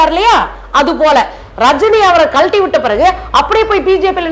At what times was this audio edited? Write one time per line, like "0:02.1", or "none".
none